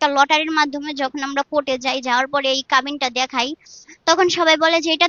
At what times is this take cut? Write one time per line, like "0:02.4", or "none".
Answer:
none